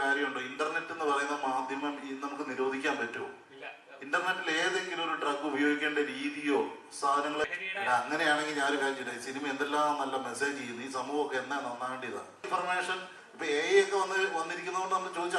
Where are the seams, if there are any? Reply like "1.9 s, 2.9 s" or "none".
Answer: 7.5 s, 12.4 s